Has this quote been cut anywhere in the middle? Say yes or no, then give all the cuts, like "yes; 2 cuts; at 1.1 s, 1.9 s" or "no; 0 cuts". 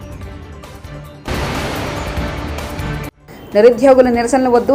no; 0 cuts